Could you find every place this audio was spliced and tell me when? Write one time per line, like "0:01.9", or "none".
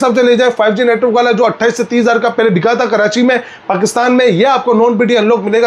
none